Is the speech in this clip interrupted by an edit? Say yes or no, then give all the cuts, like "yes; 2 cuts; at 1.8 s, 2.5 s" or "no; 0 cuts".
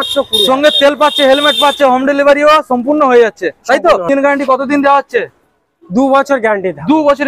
yes; 1 cut; at 4.1 s